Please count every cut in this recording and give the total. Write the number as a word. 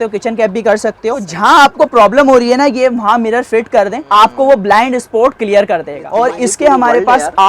three